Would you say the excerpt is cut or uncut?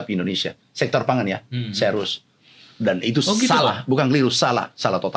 uncut